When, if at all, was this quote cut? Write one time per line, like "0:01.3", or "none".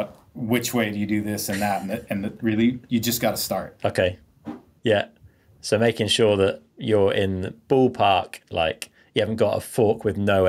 none

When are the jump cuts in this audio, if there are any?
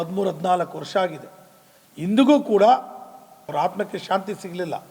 0:03.5

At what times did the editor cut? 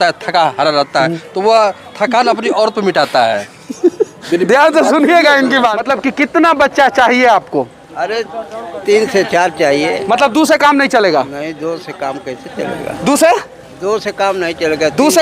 0:05.8

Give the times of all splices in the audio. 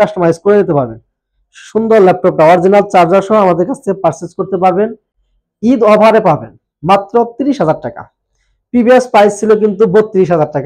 none

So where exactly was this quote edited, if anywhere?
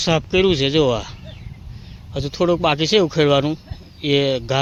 none

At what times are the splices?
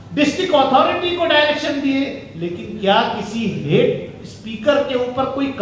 none

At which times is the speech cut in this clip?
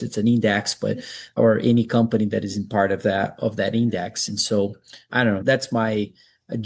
0:01.3
0:05.3

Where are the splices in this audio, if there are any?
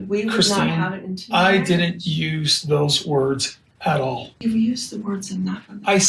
0:04.4

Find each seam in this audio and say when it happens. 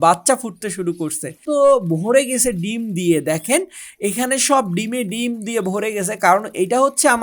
0:01.4

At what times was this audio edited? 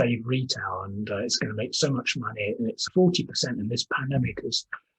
0:02.8

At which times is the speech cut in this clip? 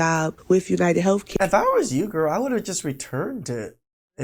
none

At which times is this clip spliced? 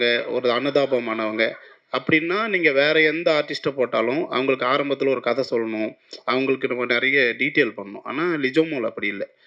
none

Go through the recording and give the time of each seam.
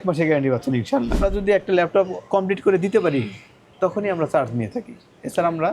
0:01.2

